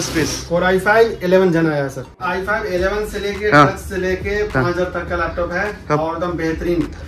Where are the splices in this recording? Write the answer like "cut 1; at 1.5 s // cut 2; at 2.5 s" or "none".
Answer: cut 1; at 2.2 s